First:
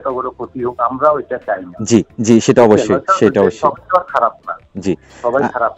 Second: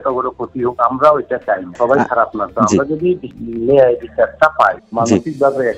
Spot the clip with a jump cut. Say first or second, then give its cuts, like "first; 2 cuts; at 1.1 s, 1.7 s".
second; 3 cuts; at 1.7 s, 3.3 s, 4.8 s